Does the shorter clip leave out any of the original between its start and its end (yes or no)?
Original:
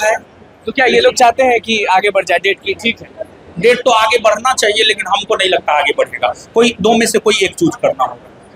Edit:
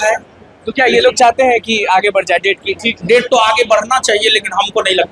yes